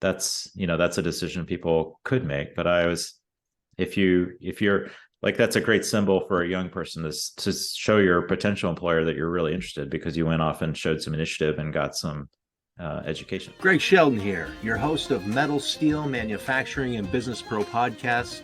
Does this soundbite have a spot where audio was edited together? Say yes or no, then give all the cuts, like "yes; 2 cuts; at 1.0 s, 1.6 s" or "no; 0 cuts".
yes; 1 cut; at 13.5 s